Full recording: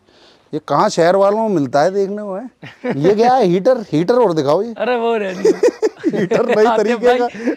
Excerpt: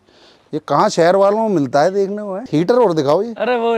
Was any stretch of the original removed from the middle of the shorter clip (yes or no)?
yes